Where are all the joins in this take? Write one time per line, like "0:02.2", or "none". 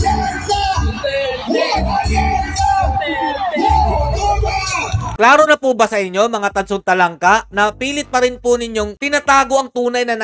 none